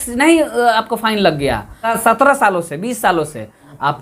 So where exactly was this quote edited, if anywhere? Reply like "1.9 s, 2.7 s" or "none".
1.9 s